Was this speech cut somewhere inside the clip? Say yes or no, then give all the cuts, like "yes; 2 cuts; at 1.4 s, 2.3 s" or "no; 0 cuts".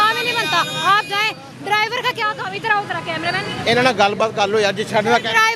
no; 0 cuts